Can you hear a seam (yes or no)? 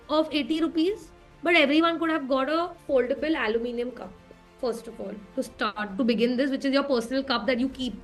no